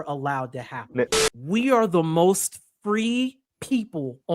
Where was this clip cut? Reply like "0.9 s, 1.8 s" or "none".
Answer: 1.1 s